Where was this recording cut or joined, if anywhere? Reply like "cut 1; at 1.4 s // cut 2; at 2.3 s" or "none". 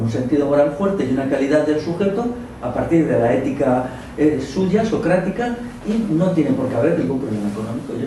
none